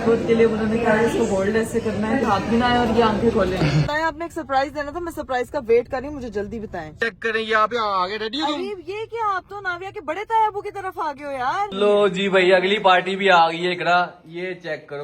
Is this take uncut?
no; 4 cuts; at 2.2 s, 3.9 s, 6.9 s, 11.7 s

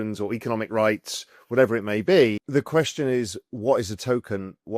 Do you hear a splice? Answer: yes; 1 cut; at 2.4 s

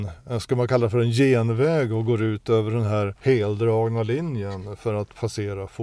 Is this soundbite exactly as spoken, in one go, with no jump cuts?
no; 1 cut; at 3.1 s

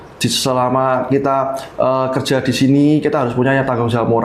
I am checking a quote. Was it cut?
no; 0 cuts

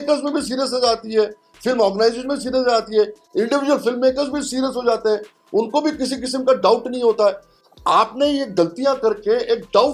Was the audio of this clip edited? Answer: no; 0 cuts

